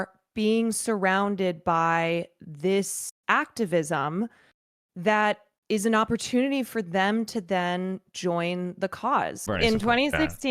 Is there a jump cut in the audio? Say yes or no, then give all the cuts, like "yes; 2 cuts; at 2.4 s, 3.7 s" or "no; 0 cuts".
yes; 1 cut; at 9.4 s